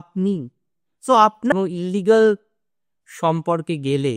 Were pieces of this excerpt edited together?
yes; 1 cut; at 1.5 s

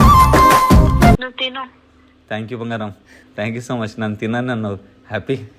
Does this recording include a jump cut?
yes; 1 cut; at 1.2 s

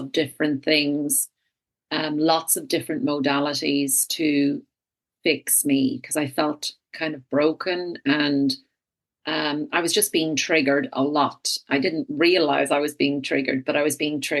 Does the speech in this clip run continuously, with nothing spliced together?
yes; 0 cuts

